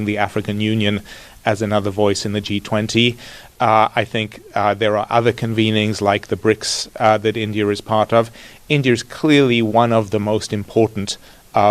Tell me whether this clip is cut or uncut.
uncut